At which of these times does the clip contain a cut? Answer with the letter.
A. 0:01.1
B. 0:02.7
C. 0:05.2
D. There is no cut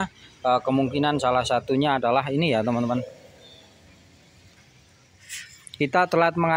D